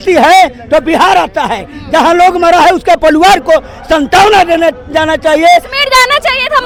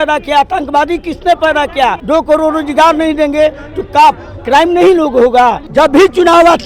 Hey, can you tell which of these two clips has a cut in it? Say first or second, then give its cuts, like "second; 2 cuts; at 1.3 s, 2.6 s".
second; 2 cuts; at 2.0 s, 5.6 s